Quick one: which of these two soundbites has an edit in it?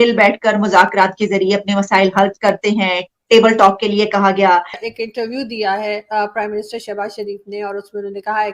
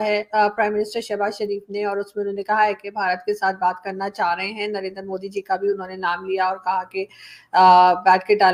first; 1 cut; at 4.8 s

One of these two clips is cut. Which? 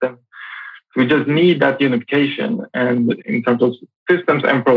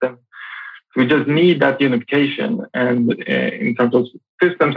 first; 1 cut; at 3.2 s

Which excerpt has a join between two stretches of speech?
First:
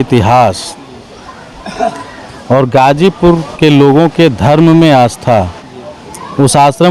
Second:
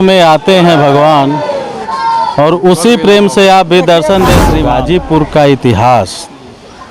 second; 1 cut; at 4.5 s

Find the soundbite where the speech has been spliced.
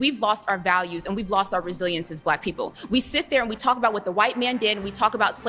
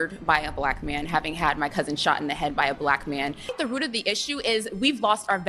second; 1 cut; at 3.5 s

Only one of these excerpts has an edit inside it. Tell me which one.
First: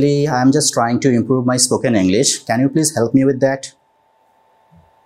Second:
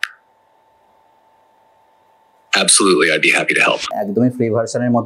second; 1 cut; at 3.9 s

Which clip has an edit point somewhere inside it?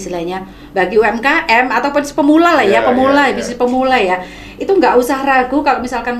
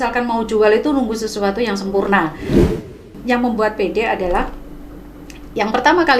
second; 1 cut; at 2.7 s

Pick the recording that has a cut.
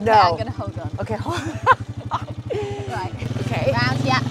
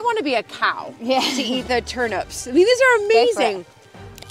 first; 1 cut; at 3.2 s

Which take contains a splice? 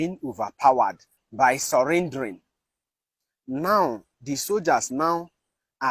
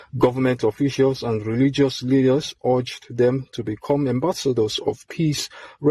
first; 1 cut; at 1.2 s

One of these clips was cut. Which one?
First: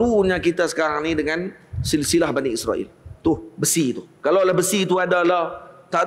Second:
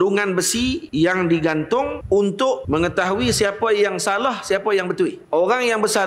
second; 4 cuts; at 0.8 s, 2.0 s, 2.6 s, 5.2 s

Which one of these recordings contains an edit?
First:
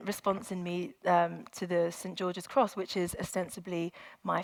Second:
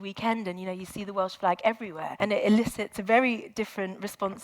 second; 2 cuts; at 2.0 s, 3.0 s

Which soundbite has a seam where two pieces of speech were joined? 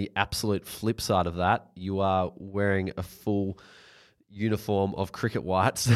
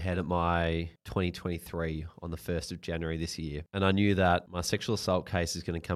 second; 3 cuts; at 1.0 s, 3.6 s, 4.5 s

